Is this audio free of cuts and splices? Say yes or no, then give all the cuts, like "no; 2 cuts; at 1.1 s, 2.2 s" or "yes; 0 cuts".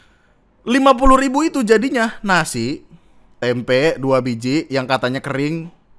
no; 1 cut; at 3.2 s